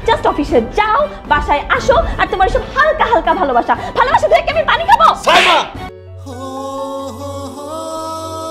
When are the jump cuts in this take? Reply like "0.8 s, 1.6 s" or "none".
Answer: 6.0 s